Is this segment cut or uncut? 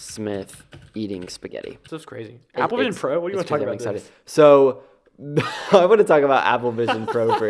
cut